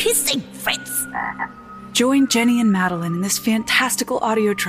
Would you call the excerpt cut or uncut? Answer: uncut